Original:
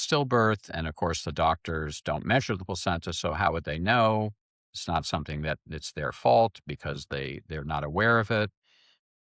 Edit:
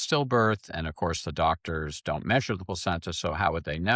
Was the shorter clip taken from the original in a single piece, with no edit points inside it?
yes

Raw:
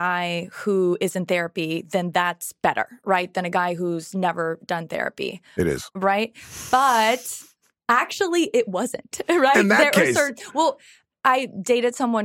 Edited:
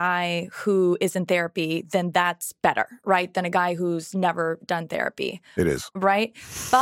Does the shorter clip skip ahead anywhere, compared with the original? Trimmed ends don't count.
no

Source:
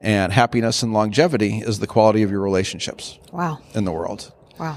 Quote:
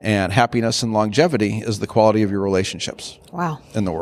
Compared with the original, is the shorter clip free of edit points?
yes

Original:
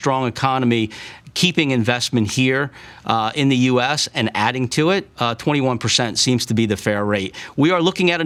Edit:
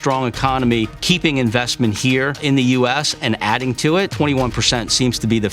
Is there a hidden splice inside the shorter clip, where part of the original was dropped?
yes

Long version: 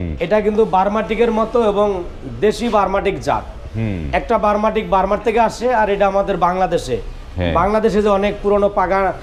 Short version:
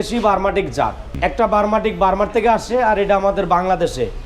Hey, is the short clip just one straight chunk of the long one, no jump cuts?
no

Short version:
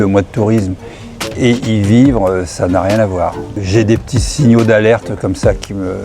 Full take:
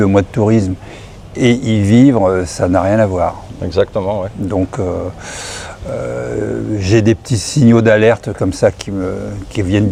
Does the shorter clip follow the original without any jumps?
no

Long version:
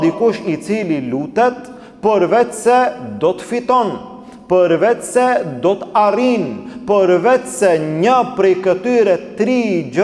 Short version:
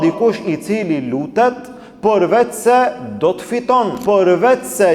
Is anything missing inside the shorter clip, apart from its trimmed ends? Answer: yes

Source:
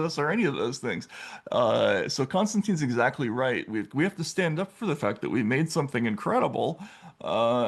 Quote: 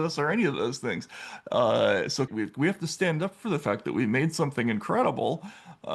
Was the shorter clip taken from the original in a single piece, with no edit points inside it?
no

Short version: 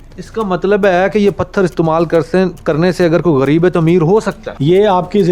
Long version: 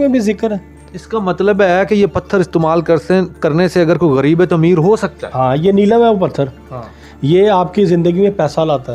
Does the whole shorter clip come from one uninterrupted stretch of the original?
no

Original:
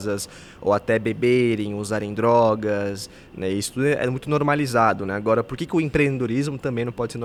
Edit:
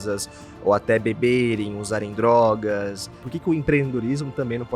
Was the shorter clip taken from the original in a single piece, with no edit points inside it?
no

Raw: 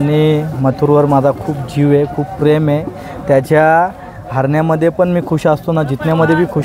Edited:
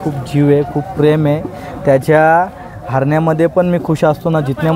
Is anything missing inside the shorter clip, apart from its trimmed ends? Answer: no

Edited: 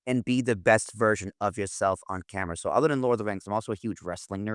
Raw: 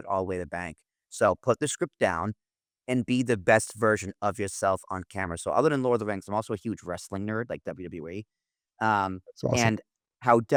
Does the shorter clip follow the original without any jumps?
yes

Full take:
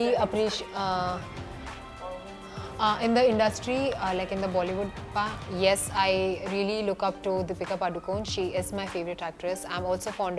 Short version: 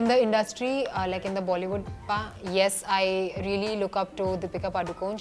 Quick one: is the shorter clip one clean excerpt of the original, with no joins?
yes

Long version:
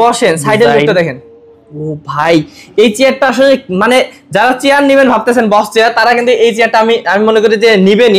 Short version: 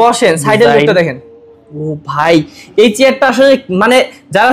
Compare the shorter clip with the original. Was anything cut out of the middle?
no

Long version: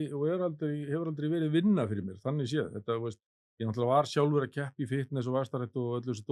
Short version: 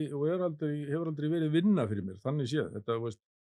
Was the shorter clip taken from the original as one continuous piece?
yes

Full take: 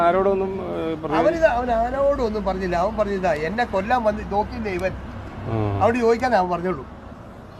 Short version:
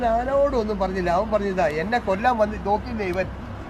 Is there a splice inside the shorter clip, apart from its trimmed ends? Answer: no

